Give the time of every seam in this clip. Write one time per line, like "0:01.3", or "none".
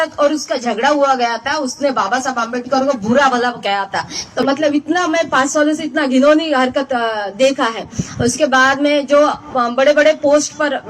0:04.4